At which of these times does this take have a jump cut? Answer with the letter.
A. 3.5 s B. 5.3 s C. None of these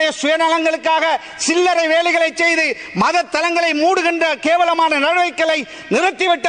C